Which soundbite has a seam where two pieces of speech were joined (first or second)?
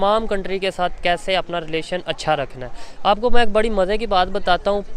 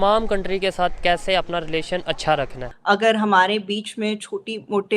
second